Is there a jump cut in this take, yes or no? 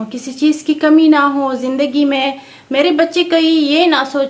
no